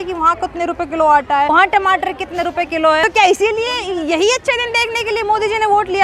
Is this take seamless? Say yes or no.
no